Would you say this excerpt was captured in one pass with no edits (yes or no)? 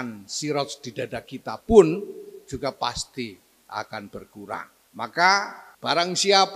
no